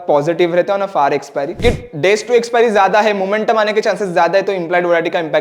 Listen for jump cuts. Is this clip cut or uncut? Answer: cut